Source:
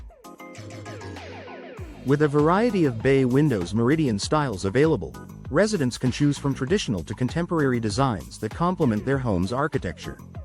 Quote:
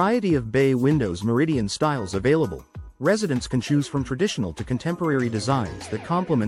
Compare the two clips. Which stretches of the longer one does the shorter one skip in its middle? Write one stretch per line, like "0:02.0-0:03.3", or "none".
none

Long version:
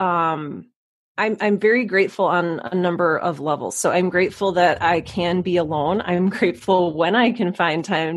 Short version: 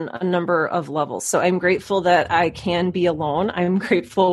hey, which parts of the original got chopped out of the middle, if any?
none

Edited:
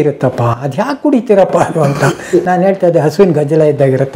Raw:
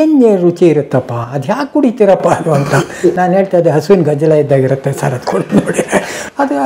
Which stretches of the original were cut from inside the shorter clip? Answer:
none

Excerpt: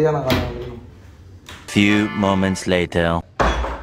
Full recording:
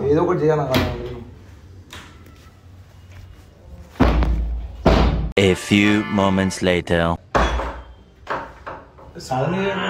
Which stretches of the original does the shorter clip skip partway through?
0:02.1-0:05.6

